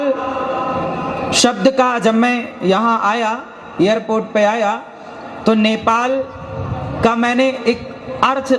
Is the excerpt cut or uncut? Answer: uncut